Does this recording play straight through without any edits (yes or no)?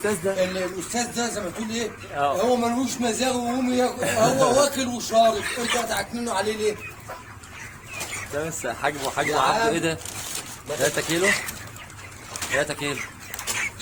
yes